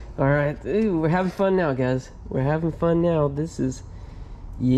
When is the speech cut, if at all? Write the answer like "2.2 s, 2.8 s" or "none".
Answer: none